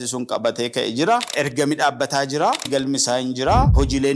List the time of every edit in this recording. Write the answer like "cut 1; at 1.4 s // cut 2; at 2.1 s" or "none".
cut 1; at 2.6 s